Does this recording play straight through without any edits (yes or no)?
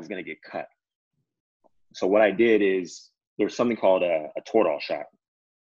yes